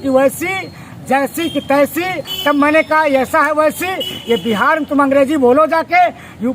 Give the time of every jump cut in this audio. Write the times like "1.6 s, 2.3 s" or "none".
2.2 s